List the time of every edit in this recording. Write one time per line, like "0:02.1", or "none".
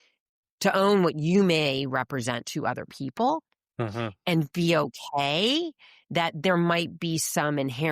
none